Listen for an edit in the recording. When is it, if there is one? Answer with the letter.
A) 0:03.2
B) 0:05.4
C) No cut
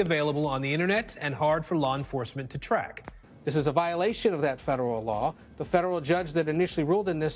A